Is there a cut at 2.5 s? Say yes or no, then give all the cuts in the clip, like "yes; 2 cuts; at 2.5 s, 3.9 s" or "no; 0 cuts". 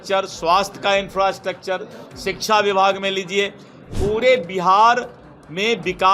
no; 1 cut; at 3.9 s